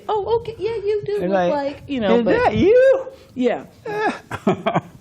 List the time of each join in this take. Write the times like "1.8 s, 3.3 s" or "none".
2.2 s